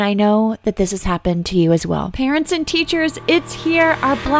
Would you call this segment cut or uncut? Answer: cut